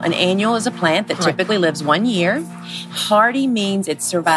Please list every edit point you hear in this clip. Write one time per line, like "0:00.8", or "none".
none